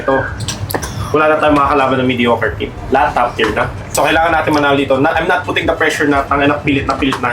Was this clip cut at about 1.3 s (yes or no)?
no